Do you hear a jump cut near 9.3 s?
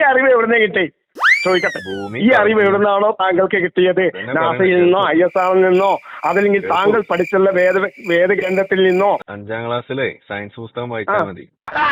yes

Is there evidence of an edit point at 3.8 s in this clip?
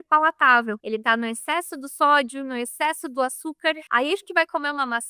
yes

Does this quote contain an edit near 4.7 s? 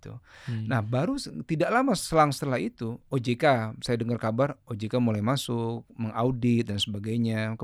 no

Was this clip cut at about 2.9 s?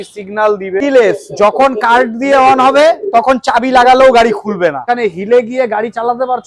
no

